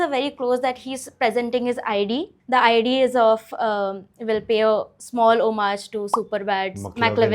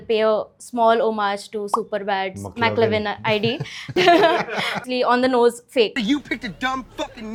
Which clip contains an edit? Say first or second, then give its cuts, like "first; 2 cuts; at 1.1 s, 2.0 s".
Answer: first; 1 cut; at 2.3 s